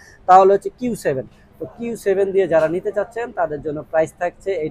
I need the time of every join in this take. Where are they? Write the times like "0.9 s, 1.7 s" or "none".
none